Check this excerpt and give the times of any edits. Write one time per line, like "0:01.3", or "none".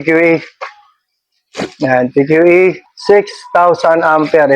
0:02.9